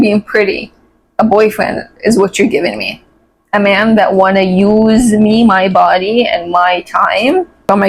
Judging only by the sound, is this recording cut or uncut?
uncut